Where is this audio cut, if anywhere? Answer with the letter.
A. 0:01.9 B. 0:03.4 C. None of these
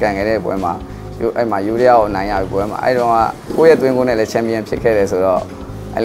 B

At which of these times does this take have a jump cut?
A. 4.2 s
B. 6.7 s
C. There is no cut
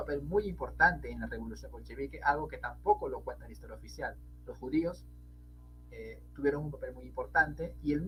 C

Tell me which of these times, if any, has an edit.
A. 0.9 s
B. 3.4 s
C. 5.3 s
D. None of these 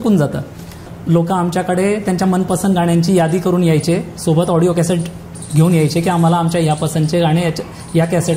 A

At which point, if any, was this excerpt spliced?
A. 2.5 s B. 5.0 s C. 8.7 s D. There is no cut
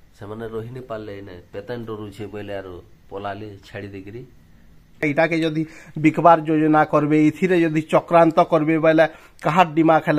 B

